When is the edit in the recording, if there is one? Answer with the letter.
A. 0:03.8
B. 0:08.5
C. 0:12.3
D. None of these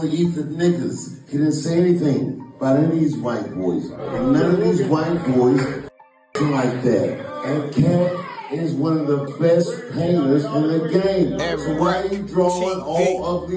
D